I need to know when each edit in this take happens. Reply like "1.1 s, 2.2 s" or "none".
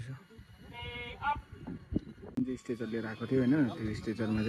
2.2 s